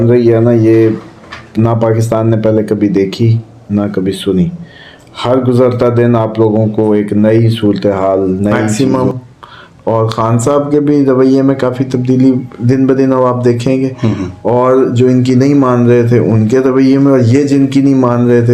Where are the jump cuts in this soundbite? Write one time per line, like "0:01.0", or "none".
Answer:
0:08.7